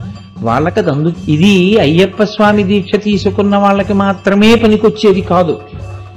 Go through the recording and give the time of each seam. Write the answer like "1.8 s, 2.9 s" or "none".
1.2 s